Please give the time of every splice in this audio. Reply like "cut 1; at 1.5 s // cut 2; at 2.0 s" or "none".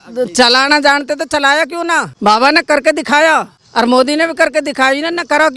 cut 1; at 2.1 s // cut 2; at 3.6 s